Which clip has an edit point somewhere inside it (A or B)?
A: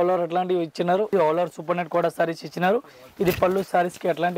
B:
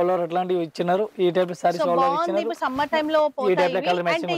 A